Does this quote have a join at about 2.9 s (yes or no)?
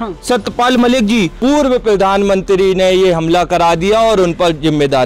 no